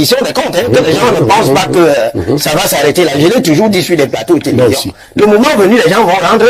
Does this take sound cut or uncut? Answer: uncut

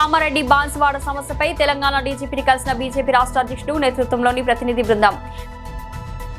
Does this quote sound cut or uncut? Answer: uncut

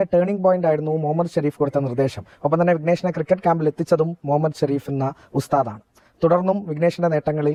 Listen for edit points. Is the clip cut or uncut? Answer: uncut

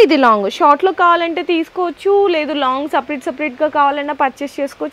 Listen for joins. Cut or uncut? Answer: uncut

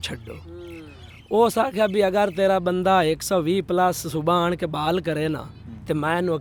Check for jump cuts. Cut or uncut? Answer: uncut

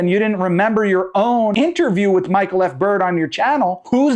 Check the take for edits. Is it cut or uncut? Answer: cut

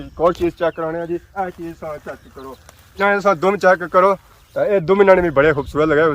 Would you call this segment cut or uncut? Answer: cut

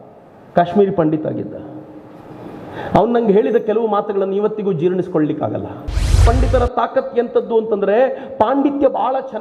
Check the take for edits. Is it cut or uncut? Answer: cut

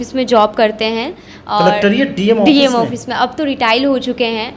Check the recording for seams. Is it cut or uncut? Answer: uncut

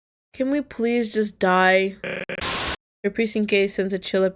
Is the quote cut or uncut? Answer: cut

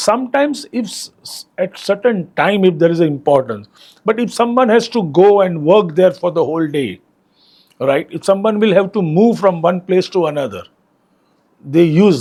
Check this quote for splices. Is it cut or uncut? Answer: uncut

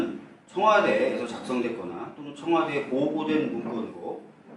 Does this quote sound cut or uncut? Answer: cut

